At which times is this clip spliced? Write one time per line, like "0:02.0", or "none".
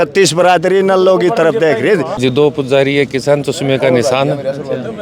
0:02.3